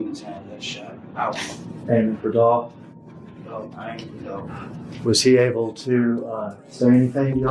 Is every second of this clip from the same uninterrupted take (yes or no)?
no